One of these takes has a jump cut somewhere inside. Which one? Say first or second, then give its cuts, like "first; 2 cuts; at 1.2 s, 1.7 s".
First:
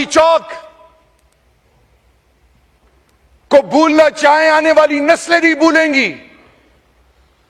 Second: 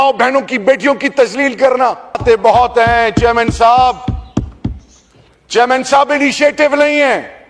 second; 1 cut; at 2.2 s